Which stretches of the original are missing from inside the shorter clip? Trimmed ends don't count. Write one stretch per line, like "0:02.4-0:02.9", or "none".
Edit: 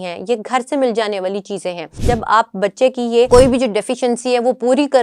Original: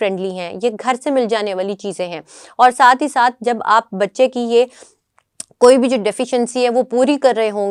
0:02.3-0:03.4
0:04.7-0:05.6